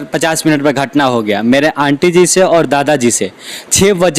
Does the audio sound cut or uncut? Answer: uncut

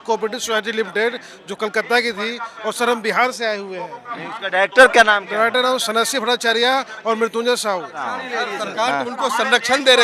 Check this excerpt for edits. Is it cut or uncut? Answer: cut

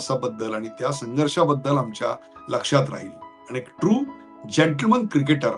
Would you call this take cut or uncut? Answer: uncut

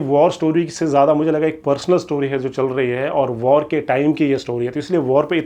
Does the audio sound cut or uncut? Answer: uncut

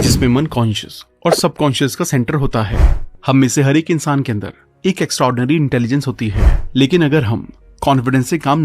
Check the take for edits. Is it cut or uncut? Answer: cut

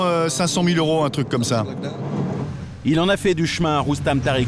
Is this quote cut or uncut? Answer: cut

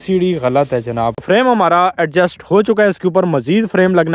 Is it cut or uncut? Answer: cut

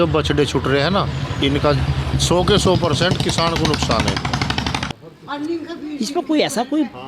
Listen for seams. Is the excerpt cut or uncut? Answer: cut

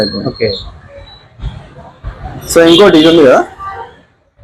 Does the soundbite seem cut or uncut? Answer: uncut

